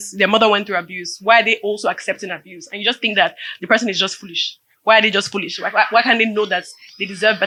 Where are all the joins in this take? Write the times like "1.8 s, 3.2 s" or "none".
none